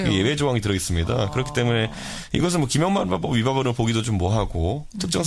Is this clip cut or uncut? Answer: uncut